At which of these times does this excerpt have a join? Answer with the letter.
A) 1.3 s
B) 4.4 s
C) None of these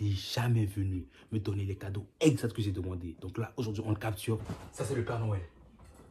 B